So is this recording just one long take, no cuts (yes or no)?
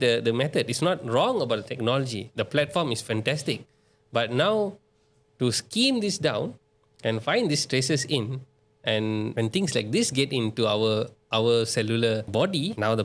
yes